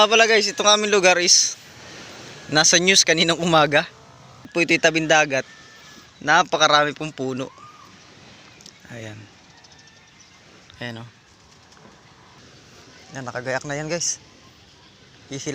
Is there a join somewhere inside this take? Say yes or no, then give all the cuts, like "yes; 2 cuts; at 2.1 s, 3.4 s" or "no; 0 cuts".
yes; 2 cuts; at 4.5 s, 12.4 s